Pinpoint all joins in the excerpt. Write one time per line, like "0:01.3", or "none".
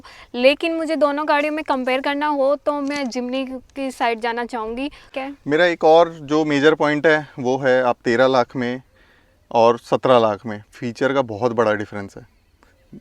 0:05.0